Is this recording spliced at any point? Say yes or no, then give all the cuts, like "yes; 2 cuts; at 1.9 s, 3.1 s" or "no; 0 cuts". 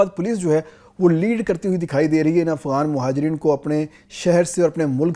no; 0 cuts